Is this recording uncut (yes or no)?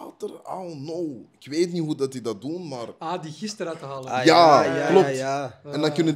yes